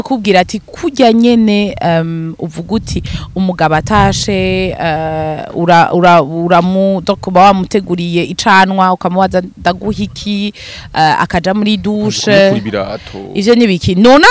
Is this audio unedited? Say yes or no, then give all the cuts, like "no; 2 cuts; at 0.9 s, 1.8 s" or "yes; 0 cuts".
yes; 0 cuts